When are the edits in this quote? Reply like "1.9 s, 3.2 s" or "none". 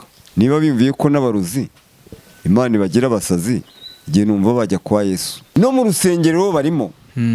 5.3 s